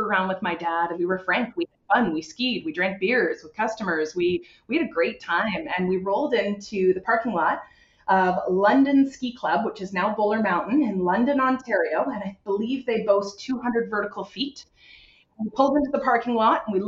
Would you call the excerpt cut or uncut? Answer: cut